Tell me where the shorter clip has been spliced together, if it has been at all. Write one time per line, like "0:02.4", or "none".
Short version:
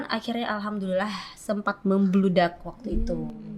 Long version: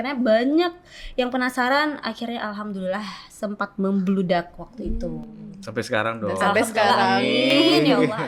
none